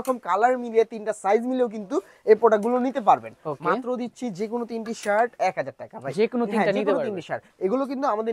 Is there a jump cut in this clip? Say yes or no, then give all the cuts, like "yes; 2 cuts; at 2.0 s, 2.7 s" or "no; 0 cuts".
no; 0 cuts